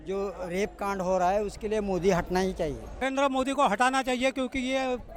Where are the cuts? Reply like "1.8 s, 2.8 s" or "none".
3.0 s